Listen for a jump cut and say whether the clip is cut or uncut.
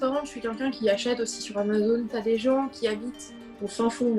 cut